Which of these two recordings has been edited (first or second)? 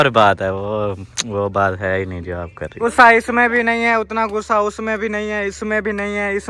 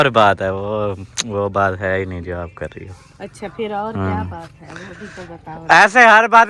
first